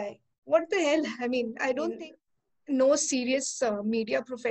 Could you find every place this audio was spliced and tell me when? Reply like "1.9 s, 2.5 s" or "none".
1.9 s